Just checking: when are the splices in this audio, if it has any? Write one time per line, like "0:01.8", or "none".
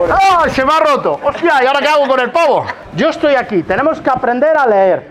0:02.8